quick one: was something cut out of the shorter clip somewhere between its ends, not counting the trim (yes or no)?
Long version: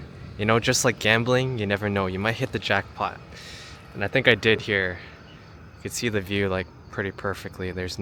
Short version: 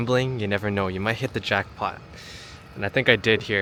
no